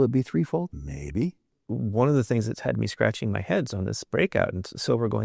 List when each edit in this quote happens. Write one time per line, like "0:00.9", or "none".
0:01.2

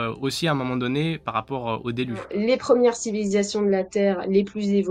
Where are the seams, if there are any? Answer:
0:02.3

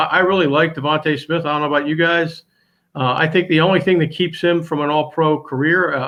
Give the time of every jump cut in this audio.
none

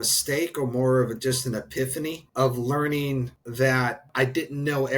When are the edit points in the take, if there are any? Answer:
0:02.2
0:03.4
0:04.1

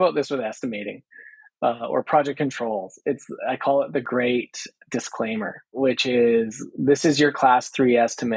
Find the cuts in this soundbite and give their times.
0:04.0
0:05.7

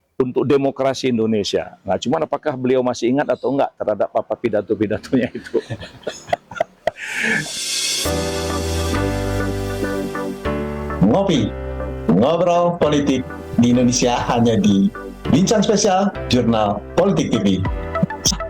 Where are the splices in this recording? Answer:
0:07.5

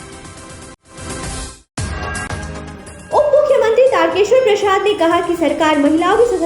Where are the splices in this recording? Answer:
0:01.6

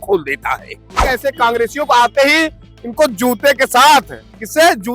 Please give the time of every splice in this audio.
0:01.0

